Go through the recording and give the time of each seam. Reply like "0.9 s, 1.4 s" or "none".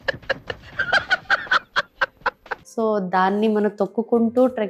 none